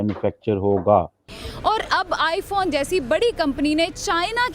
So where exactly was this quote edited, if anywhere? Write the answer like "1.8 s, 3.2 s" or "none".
1.4 s